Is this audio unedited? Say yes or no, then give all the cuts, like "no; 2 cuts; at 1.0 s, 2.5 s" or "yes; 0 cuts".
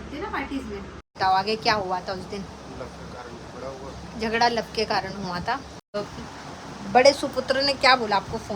no; 2 cuts; at 1.2 s, 6.0 s